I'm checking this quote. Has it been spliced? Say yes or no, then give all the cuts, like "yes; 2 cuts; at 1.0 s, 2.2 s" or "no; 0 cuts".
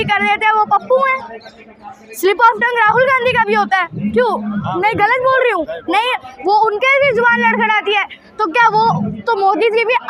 no; 0 cuts